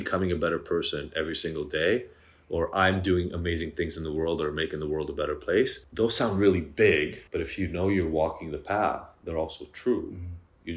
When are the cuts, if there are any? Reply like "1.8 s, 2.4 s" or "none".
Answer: 5.8 s, 7.2 s